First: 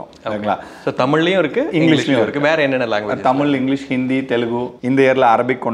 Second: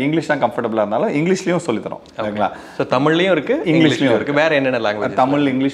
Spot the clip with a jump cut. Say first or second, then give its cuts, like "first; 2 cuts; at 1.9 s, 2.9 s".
first; 1 cut; at 4.7 s